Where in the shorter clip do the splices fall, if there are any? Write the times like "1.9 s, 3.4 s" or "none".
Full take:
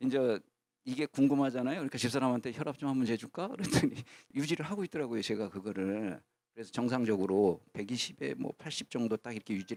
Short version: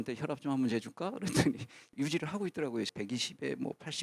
2.9 s